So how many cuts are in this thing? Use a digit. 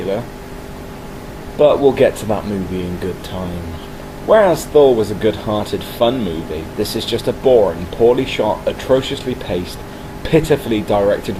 0